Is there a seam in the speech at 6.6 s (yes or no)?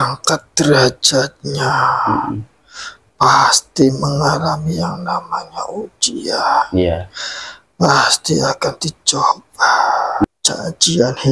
no